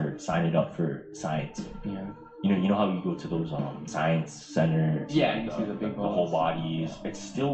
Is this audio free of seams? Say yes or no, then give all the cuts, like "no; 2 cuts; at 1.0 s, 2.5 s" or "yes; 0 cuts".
yes; 0 cuts